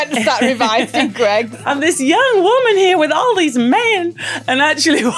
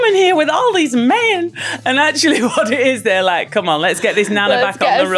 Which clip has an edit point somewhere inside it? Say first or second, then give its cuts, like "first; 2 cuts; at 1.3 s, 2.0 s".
first; 1 cut; at 1.5 s